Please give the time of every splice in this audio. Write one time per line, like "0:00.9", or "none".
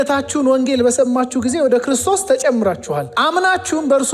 0:03.1